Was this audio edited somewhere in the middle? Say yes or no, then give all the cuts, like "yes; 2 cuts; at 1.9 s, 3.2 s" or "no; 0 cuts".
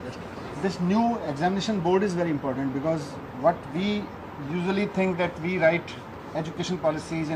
no; 0 cuts